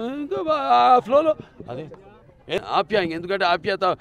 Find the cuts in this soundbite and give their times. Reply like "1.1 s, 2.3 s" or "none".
2.6 s